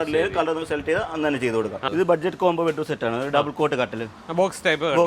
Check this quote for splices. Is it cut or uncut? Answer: cut